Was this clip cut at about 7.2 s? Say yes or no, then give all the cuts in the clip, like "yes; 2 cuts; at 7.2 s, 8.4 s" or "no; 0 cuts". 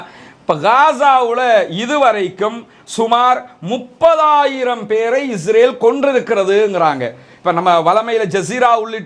no; 0 cuts